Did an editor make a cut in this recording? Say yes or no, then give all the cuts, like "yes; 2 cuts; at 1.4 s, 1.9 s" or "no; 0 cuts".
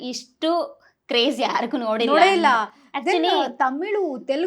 no; 0 cuts